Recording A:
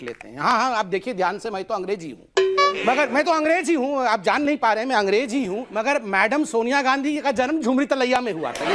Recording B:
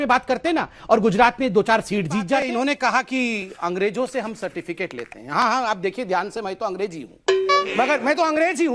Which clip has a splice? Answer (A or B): B